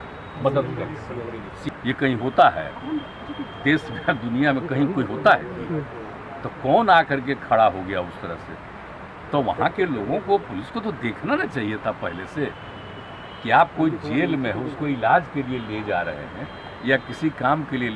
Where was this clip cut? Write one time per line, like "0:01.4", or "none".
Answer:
0:01.7